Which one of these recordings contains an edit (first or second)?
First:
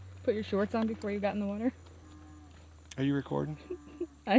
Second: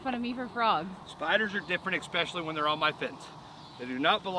second